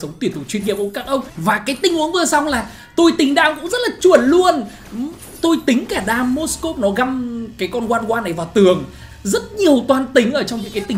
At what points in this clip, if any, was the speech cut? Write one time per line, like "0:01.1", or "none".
0:01.3
0:09.0